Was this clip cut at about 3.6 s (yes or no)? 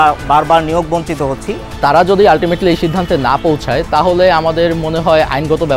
no